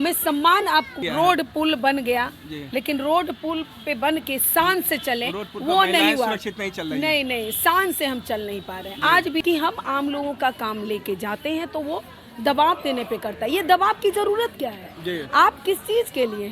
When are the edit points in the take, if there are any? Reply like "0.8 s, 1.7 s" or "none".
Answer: 0.9 s, 9.4 s